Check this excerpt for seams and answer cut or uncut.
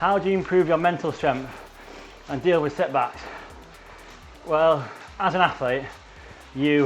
uncut